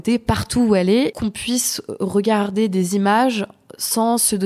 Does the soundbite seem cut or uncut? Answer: cut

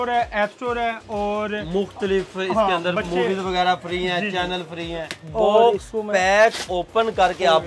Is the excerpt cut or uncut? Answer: cut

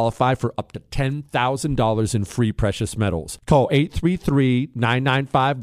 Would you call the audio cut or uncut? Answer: uncut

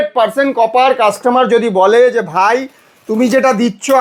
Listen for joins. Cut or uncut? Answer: uncut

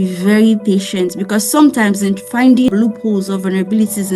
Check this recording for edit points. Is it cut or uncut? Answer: cut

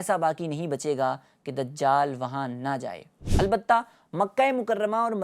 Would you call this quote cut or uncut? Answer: uncut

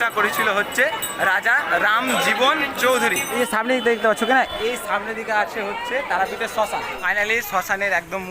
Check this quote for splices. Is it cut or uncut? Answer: cut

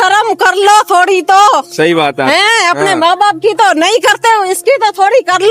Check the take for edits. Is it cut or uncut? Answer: uncut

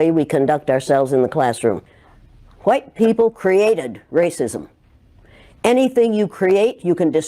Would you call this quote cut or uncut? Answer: cut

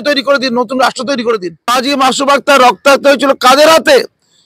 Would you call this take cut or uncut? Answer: cut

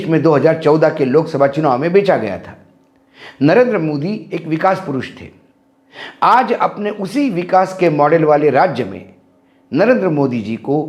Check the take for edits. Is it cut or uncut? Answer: uncut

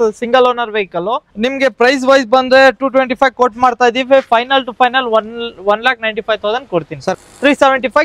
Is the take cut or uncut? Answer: cut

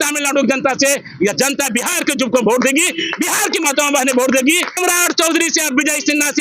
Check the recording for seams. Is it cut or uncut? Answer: cut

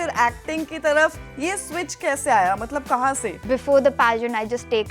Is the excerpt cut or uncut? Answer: cut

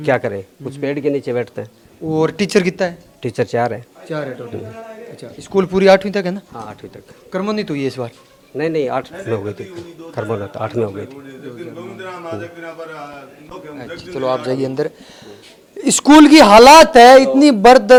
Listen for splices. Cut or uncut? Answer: uncut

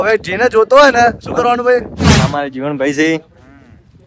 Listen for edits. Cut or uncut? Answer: cut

